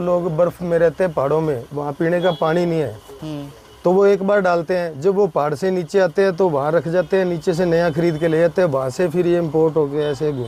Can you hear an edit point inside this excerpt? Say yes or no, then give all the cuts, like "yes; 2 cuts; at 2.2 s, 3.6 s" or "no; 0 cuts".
no; 0 cuts